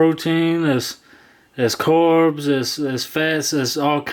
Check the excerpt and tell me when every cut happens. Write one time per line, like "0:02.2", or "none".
none